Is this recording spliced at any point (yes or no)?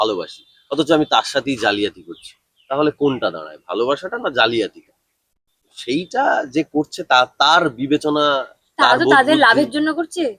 no